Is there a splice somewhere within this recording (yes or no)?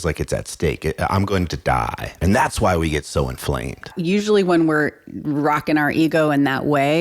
yes